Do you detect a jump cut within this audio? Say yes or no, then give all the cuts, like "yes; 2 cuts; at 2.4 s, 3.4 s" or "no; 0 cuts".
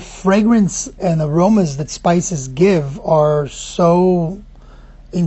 yes; 1 cut; at 0.9 s